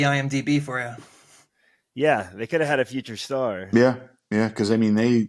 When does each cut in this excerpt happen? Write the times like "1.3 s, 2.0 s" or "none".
3.6 s